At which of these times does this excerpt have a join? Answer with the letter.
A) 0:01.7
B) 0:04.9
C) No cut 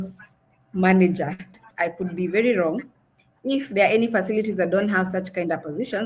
A